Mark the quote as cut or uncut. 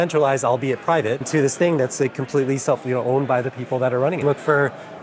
cut